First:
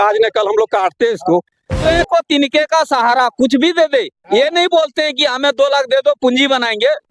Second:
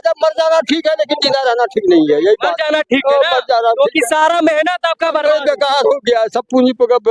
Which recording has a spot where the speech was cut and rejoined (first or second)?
first